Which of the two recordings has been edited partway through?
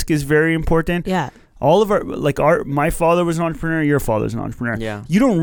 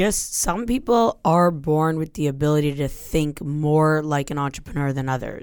first; 1 cut; at 1.4 s

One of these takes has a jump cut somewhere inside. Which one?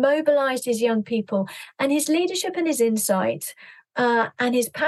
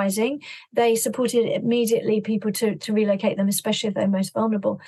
first; 1 cut; at 1.6 s

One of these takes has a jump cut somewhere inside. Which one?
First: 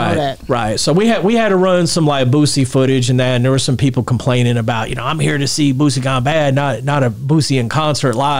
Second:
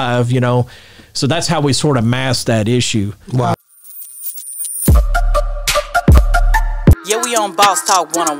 second; 1 cut; at 3.5 s

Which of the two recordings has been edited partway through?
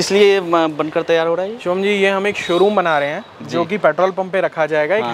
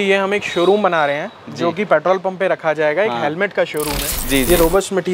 second; 1 cut; at 4.2 s

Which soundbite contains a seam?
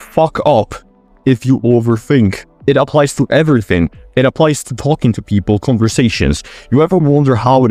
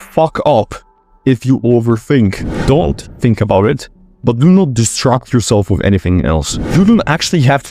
second; 2 cuts; at 2.5 s, 6.7 s

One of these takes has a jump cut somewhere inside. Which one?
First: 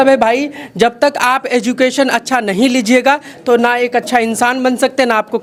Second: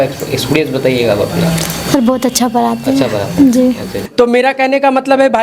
second; 1 cut; at 3.9 s

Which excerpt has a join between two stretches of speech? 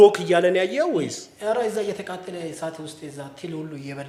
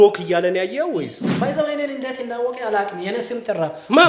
second; 1 cut; at 1.2 s

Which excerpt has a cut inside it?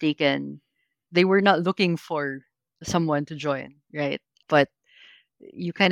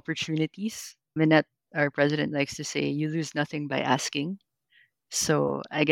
first; 1 cut; at 1.0 s

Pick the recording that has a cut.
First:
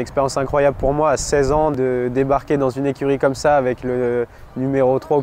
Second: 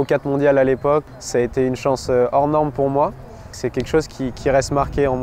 second; 2 cuts; at 1.1 s, 3.6 s

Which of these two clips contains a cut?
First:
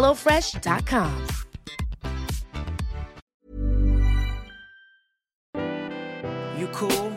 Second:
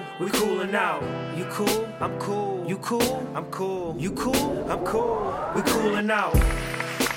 first; 2 cuts; at 3.2 s, 5.5 s

